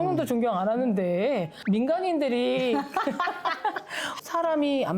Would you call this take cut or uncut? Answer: cut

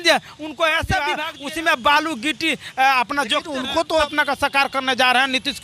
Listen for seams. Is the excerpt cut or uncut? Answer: cut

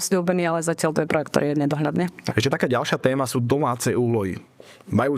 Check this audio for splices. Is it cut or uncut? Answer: cut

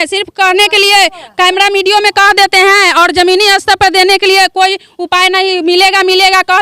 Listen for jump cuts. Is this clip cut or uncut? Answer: uncut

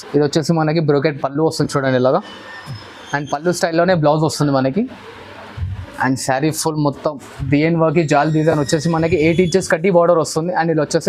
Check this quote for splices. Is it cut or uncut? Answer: uncut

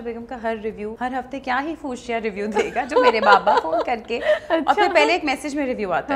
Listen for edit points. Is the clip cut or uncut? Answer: cut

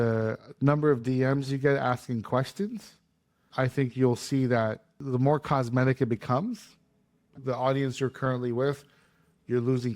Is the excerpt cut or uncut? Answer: cut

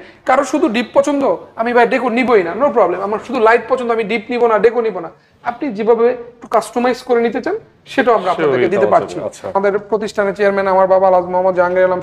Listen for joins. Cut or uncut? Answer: cut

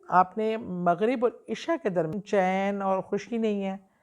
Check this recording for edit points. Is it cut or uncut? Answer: cut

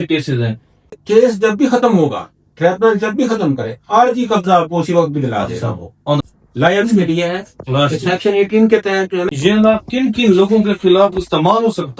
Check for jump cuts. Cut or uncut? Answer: cut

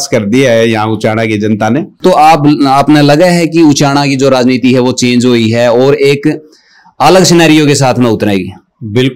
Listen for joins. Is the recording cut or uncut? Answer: cut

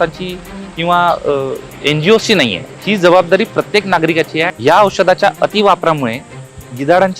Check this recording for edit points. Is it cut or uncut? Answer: cut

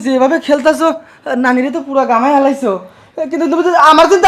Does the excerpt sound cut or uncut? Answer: uncut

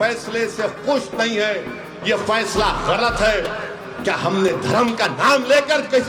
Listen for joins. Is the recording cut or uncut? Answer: uncut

